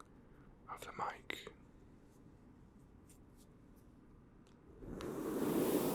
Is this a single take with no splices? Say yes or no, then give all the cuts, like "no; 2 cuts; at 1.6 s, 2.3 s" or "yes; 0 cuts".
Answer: yes; 0 cuts